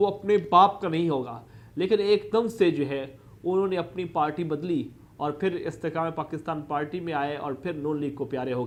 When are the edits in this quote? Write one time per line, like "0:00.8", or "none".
none